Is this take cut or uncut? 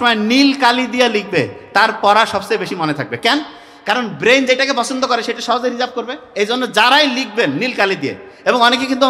uncut